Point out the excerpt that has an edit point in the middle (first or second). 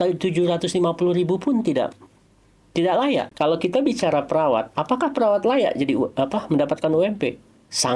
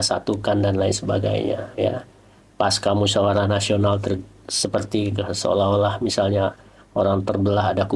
first